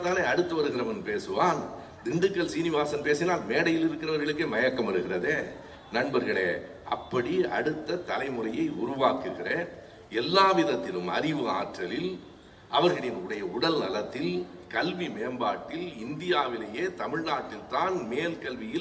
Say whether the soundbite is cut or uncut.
uncut